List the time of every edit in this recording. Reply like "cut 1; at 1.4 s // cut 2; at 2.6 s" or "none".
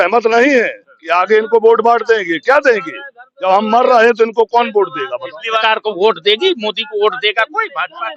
cut 1; at 5.6 s